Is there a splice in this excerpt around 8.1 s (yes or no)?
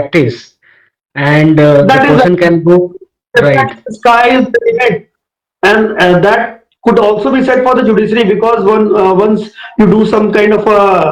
no